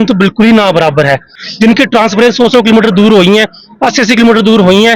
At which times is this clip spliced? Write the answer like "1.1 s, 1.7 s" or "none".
1.4 s